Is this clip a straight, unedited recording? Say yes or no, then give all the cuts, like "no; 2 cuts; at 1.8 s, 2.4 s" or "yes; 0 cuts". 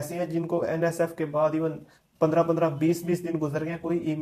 yes; 0 cuts